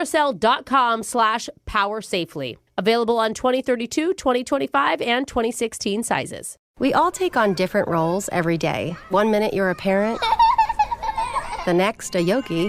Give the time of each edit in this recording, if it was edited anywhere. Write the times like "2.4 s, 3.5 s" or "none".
6.6 s